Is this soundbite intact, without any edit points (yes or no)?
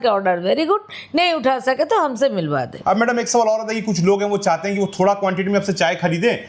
no